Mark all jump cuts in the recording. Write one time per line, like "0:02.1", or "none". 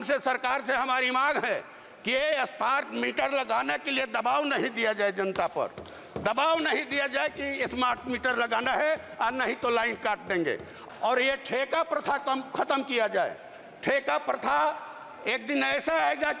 0:10.8